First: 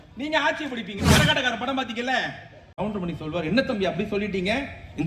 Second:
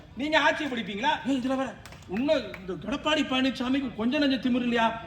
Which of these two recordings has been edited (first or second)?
first